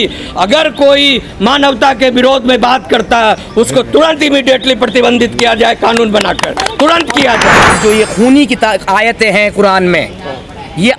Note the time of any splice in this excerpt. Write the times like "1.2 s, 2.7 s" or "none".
7.8 s